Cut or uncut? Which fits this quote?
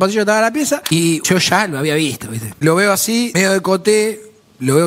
cut